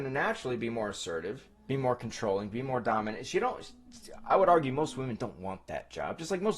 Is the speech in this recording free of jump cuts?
no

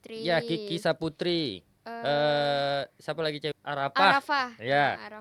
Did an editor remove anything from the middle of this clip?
no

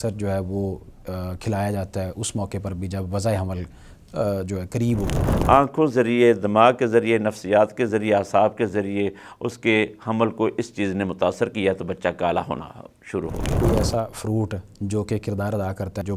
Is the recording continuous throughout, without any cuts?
no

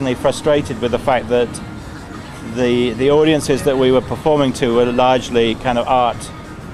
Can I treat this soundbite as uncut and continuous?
yes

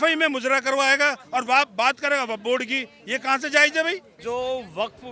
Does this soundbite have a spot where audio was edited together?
yes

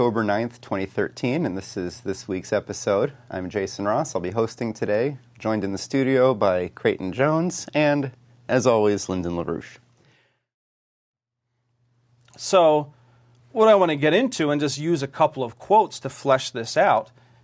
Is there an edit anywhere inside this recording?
yes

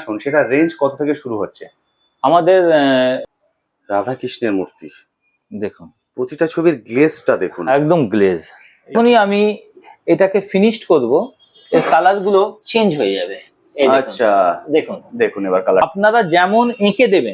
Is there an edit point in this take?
yes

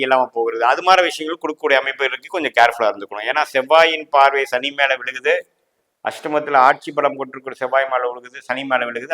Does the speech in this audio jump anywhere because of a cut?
no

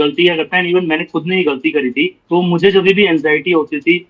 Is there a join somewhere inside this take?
yes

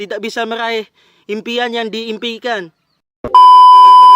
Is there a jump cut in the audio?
yes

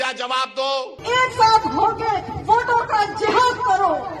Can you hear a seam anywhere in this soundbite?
yes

